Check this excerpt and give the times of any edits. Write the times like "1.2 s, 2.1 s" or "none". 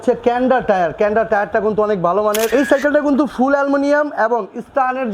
2.5 s